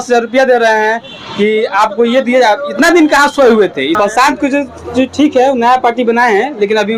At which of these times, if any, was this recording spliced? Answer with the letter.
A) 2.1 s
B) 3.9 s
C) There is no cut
B